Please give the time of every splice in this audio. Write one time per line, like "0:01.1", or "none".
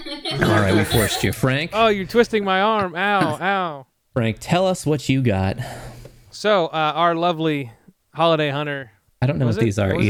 none

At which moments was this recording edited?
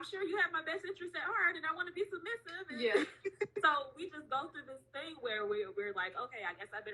none

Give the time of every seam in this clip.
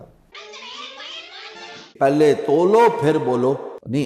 0:01.9

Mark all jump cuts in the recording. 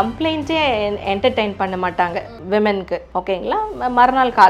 0:02.3
0:03.1

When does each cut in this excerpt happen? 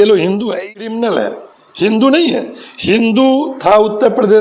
0:00.9

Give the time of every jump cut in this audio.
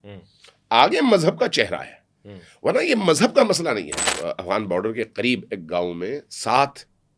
0:04.1

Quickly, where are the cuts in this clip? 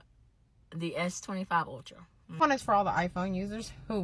0:02.3

